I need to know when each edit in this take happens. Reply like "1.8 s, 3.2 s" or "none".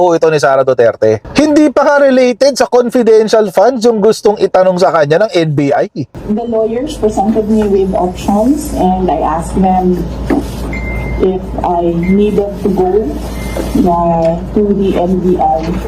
1.2 s, 6.1 s